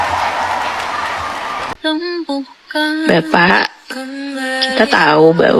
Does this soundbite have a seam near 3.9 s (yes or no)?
no